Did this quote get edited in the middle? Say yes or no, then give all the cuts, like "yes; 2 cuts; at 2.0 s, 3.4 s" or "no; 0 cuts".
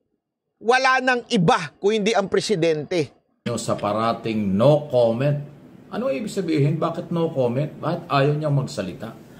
yes; 1 cut; at 3.5 s